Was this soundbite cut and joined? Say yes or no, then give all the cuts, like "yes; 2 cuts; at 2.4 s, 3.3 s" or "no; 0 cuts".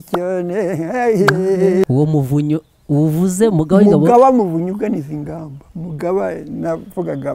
yes; 1 cut; at 1.8 s